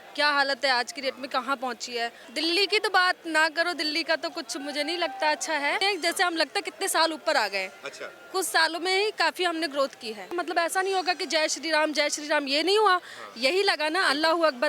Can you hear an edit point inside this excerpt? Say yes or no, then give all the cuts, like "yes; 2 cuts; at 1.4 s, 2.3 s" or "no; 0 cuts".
yes; 3 cuts; at 2.2 s, 5.8 s, 10.3 s